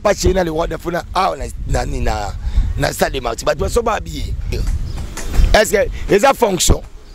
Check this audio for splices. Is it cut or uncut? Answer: cut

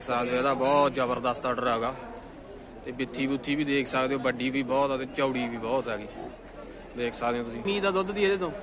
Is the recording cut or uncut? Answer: cut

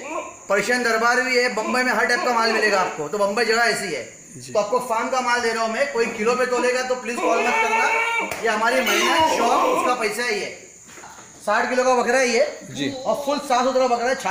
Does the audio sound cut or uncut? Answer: cut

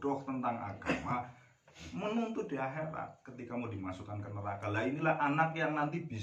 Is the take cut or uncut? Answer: uncut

